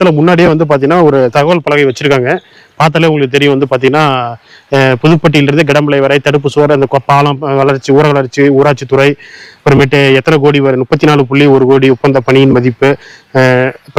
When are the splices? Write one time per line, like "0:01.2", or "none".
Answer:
none